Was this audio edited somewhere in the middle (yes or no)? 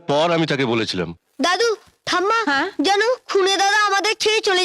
yes